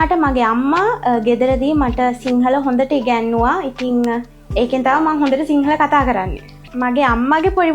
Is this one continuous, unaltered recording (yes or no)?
no